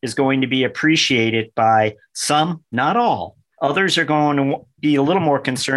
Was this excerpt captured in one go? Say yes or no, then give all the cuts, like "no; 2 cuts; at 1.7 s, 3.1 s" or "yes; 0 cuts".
yes; 0 cuts